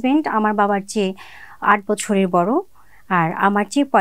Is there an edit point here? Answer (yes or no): no